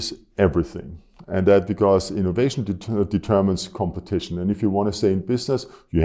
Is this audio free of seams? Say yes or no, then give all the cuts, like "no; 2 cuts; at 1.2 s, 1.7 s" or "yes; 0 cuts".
yes; 0 cuts